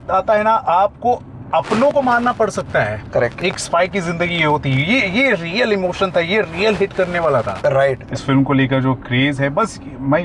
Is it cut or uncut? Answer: cut